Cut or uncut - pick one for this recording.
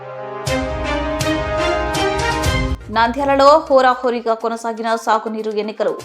cut